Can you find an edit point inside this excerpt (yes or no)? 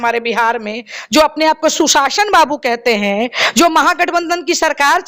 no